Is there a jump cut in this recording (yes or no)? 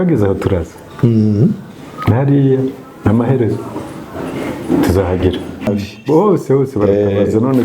yes